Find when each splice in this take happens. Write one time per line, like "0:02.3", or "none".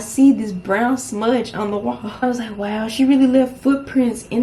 0:02.2